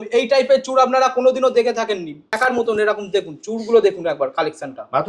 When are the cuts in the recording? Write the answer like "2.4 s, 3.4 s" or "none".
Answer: 2.4 s